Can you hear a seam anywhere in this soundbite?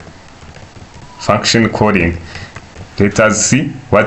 yes; 1 cut; at 2.8 s

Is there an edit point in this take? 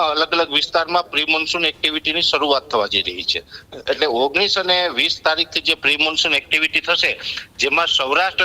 no; 0 cuts

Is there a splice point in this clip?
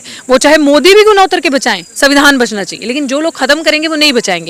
no; 0 cuts

